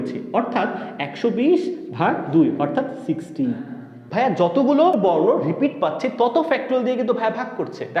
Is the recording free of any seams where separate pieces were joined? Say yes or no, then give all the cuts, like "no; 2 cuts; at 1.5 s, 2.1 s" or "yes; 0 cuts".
no; 2 cuts; at 4.0 s, 4.9 s